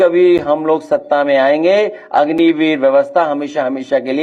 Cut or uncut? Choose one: uncut